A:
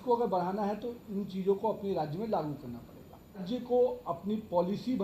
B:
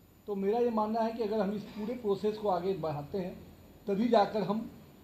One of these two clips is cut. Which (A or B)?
A